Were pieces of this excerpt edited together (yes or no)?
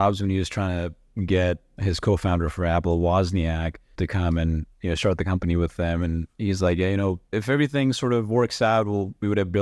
yes